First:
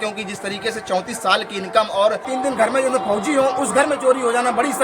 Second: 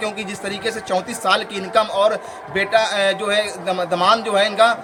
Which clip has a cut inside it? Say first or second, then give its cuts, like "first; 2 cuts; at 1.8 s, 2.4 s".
first; 1 cut; at 2.3 s